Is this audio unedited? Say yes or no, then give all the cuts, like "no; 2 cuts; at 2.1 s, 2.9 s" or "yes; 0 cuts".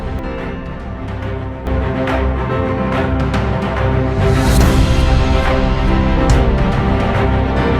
no; 1 cut; at 1.5 s